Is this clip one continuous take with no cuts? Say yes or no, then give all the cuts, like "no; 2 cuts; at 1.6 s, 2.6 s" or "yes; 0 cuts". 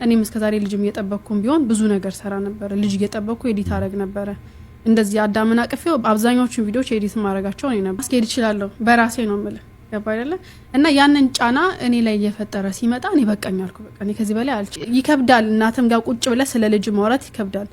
no; 2 cuts; at 8.0 s, 14.7 s